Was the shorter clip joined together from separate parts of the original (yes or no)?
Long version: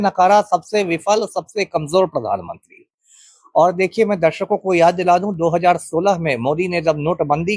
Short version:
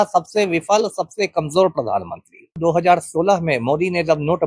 yes